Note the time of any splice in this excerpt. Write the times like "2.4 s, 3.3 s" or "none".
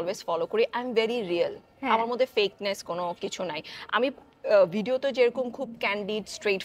none